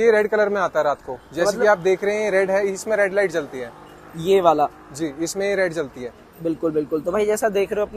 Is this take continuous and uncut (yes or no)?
yes